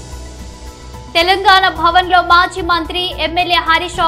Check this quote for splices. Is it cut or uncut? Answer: cut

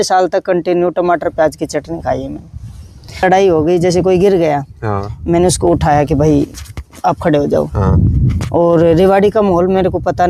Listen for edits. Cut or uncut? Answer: cut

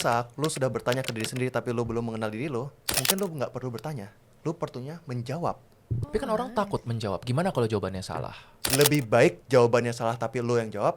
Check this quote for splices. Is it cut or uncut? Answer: cut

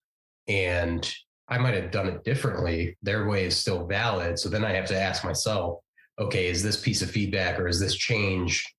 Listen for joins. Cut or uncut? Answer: uncut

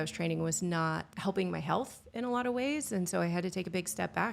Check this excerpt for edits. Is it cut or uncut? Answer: cut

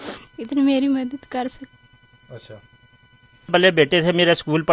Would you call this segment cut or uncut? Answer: cut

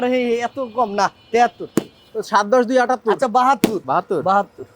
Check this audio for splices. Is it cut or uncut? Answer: cut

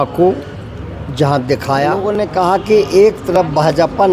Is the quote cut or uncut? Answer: cut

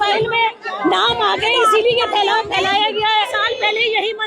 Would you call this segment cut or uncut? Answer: cut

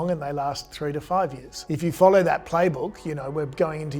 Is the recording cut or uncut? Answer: cut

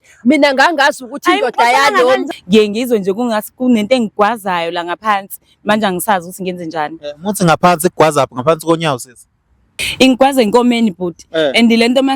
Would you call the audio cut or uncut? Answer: cut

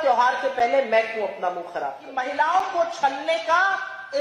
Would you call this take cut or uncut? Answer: cut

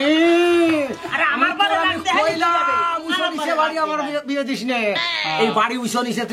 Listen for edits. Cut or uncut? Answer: uncut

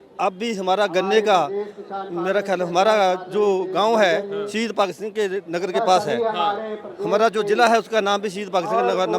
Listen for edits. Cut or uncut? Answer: uncut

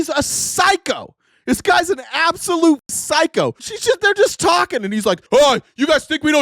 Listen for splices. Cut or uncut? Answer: cut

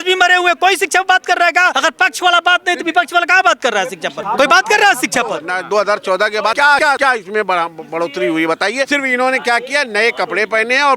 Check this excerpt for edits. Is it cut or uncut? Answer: cut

